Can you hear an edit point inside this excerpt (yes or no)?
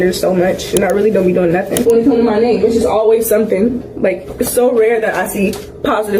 yes